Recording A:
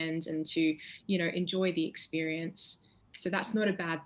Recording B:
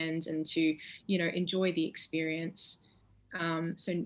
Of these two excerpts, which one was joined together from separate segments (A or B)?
A